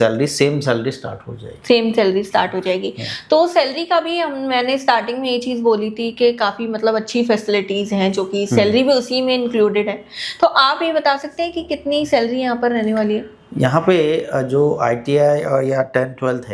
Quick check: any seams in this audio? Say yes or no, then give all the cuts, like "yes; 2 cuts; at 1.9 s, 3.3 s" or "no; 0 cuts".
no; 0 cuts